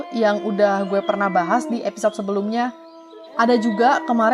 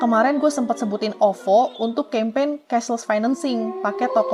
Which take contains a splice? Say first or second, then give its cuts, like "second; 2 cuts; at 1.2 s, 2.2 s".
first; 1 cut; at 3.1 s